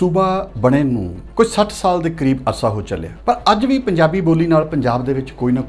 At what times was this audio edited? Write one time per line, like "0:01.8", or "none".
0:01.2
0:03.1